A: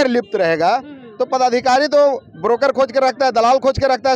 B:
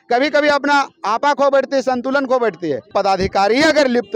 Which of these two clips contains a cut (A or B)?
B